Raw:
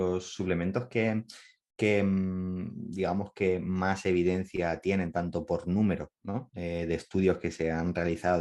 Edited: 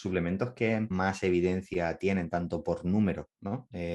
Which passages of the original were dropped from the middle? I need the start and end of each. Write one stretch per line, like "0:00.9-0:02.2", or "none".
0:01.3-0:03.7